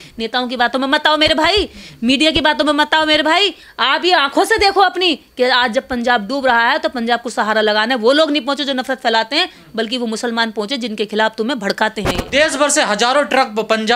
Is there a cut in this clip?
no; 0 cuts

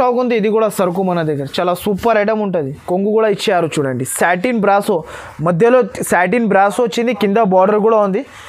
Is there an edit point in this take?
yes; 1 cut; at 2.8 s

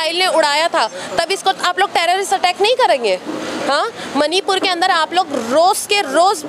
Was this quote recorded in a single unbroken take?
yes; 0 cuts

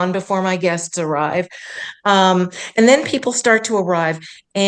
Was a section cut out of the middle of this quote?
no; 0 cuts

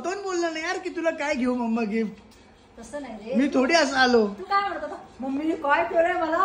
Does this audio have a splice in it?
no; 0 cuts

